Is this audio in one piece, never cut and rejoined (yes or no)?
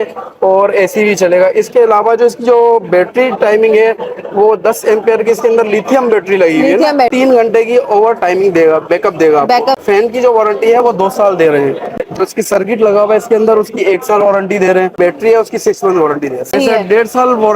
no